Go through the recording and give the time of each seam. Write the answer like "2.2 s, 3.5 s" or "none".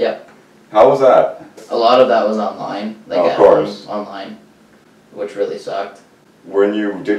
1.6 s